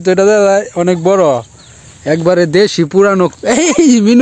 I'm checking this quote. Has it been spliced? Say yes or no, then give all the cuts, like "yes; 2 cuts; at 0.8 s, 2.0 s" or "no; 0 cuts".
no; 0 cuts